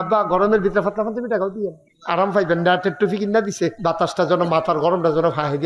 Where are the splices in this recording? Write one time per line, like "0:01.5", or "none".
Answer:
0:01.9
0:03.8